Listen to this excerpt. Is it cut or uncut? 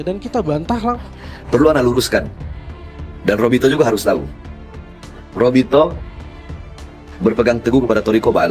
cut